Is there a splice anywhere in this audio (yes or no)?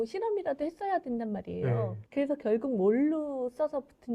no